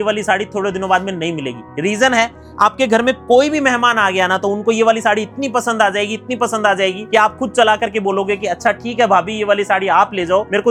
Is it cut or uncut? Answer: uncut